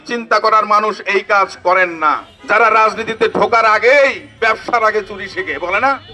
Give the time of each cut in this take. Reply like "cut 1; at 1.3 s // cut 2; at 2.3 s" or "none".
cut 1; at 2.3 s